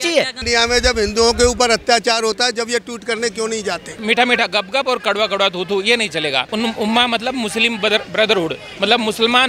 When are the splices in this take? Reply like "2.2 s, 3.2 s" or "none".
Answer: 3.9 s, 6.5 s

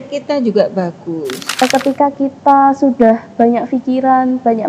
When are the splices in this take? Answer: 1.6 s

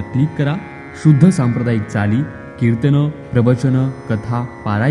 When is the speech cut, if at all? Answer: none

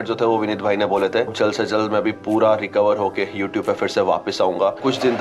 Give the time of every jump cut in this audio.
1.3 s

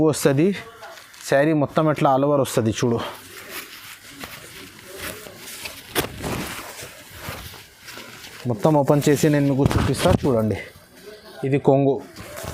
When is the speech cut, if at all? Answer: none

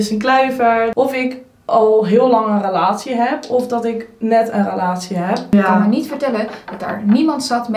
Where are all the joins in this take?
0.9 s, 5.5 s

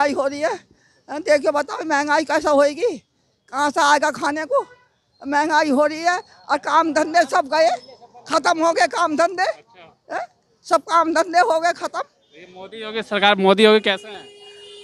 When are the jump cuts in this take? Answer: none

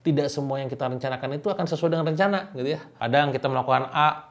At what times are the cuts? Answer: 2.9 s

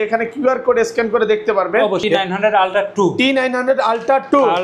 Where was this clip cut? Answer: 2.0 s

